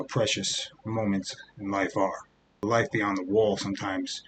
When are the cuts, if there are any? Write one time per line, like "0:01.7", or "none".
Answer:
0:02.6